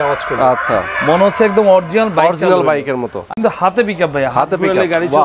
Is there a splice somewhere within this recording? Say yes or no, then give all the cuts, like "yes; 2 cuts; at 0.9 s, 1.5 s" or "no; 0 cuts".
yes; 1 cut; at 3.3 s